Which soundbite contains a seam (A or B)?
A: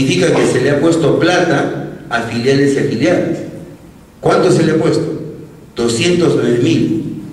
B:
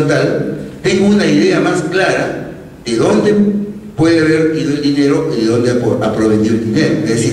A